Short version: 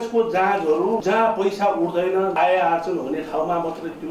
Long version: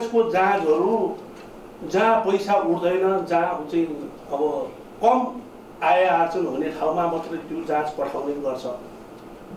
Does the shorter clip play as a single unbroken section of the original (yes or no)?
no